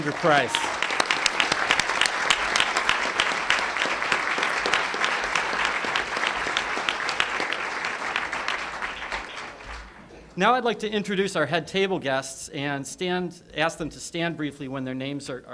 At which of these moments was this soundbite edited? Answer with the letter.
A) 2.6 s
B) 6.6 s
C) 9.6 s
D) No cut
C